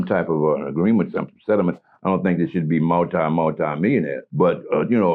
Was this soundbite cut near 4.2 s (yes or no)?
yes